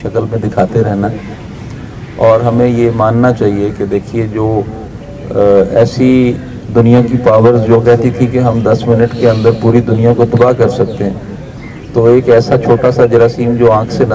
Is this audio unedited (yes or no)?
yes